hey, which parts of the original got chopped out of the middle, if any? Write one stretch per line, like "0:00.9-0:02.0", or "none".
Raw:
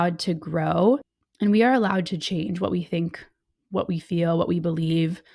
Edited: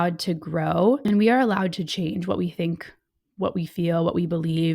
0:01.0-0:01.4